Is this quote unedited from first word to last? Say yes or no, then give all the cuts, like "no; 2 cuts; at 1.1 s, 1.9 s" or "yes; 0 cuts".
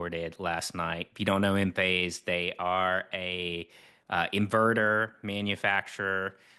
yes; 0 cuts